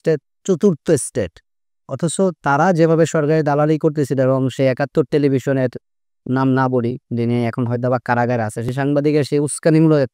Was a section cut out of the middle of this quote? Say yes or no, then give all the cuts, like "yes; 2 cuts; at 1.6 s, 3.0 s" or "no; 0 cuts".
no; 0 cuts